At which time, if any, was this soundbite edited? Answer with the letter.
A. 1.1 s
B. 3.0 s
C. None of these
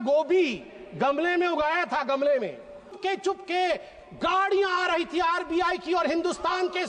B